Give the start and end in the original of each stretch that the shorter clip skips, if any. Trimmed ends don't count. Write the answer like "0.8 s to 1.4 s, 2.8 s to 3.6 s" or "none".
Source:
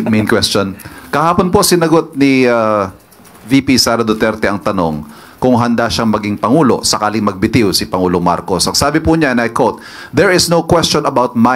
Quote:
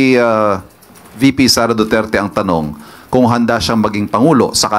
none